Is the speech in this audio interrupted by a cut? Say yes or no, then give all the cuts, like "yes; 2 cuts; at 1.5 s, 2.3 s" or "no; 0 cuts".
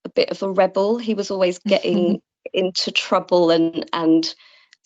no; 0 cuts